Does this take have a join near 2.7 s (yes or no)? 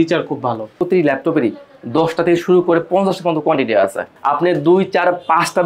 no